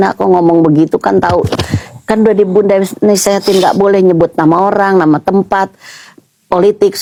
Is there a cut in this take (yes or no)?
no